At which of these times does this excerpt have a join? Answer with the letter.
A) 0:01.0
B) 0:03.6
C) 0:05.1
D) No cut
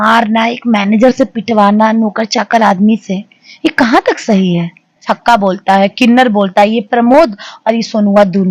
C